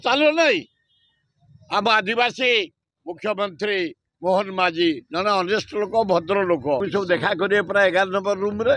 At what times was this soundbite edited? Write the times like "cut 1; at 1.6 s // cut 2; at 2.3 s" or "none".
cut 1; at 6.8 s